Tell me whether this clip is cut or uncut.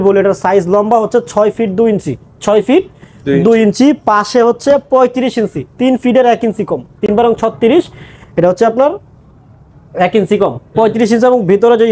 uncut